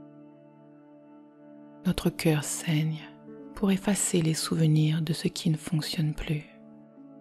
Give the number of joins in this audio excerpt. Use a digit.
2